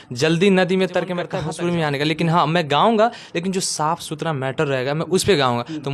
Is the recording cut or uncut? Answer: cut